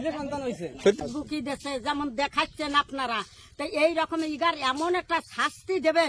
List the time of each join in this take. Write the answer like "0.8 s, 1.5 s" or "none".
1.0 s